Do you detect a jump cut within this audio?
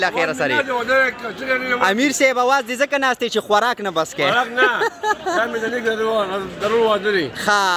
no; 0 cuts

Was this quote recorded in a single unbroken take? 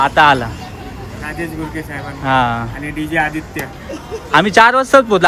yes; 0 cuts

